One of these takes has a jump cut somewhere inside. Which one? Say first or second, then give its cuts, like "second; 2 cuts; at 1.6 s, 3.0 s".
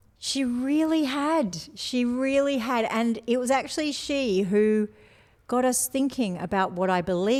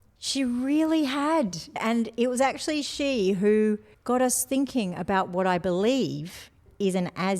second; 2 cuts; at 1.8 s, 3.9 s